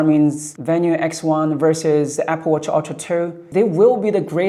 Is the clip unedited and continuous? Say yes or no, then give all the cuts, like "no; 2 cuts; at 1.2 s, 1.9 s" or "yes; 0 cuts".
yes; 0 cuts